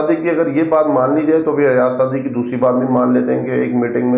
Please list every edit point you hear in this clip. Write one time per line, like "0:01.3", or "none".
none